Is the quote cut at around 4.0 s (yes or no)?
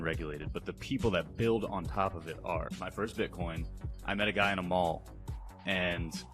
no